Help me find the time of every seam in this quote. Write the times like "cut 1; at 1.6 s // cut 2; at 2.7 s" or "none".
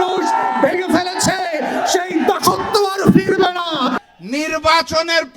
cut 1; at 3.9 s